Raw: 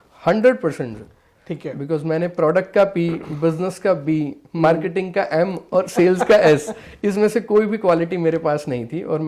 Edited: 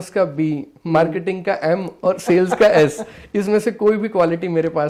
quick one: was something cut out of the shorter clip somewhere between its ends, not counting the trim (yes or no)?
no